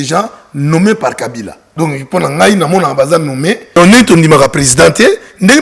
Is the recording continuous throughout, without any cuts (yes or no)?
no